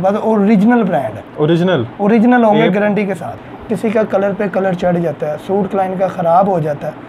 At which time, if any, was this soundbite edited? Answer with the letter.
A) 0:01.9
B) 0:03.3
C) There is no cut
B